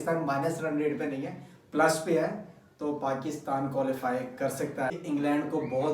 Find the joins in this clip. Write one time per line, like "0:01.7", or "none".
0:04.9